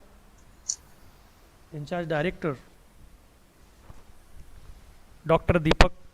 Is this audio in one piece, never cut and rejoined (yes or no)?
no